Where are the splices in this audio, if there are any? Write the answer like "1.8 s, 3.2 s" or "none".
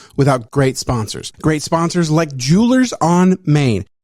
1.0 s